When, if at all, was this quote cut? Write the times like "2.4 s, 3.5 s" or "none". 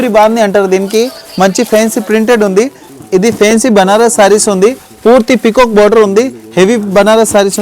2.8 s

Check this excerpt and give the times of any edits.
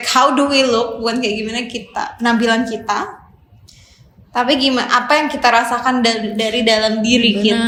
none

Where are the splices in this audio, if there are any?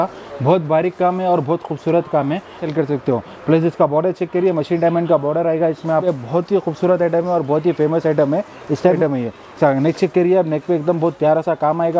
2.6 s, 6.0 s, 9.0 s

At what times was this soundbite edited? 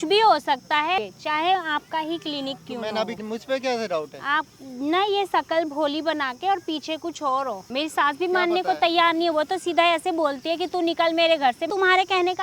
1.0 s, 3.1 s, 7.6 s, 11.7 s

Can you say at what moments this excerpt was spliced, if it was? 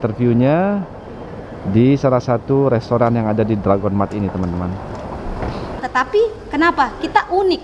5.8 s

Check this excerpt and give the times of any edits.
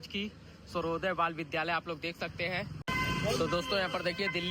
2.7 s

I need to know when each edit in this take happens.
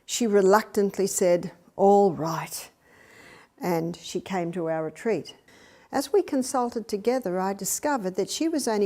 5.4 s

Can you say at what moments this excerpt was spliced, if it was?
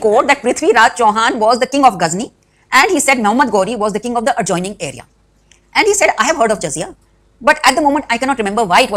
none

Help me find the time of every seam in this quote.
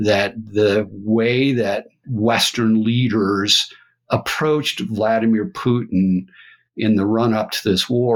none

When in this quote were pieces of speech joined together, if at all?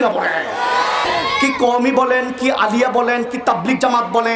1.0 s

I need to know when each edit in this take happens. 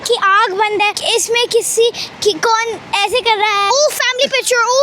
1.0 s, 3.6 s

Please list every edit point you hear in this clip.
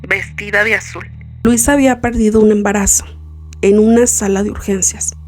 1.2 s

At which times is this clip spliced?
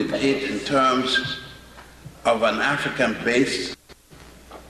3.4 s

